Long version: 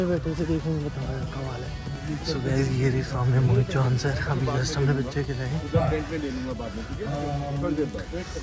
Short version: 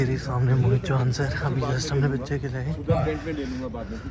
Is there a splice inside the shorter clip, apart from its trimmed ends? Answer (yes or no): no